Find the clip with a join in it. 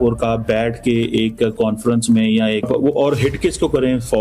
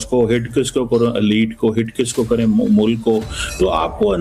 first; 1 cut; at 2.6 s

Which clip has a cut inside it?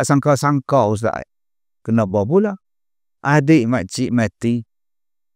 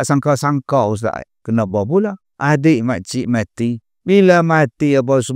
second; 3 cuts; at 1.3 s, 2.3 s, 3.9 s

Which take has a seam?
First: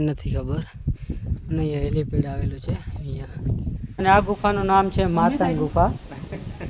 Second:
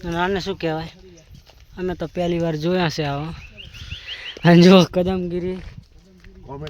first; 1 cut; at 3.9 s

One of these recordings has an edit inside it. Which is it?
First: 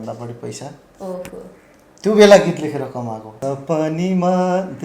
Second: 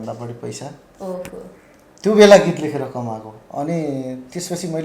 first; 1 cut; at 3.3 s

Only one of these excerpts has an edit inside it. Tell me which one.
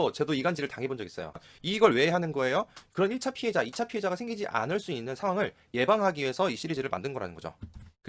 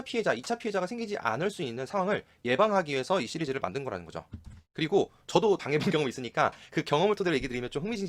first; 1 cut; at 1.4 s

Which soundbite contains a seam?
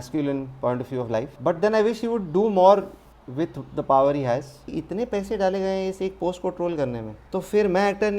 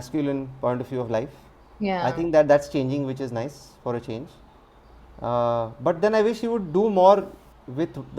first; 3 cuts; at 1.3 s, 4.7 s, 7.1 s

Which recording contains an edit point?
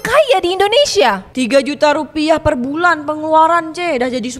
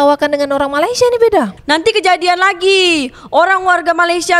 second; 1 cut; at 1.5 s

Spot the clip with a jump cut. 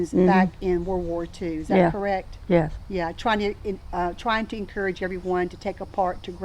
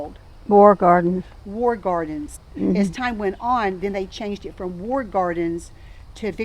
second; 1 cut; at 2.4 s

